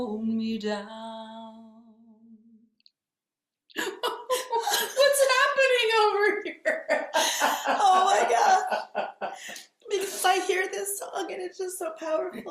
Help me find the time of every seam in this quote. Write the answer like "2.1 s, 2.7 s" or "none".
none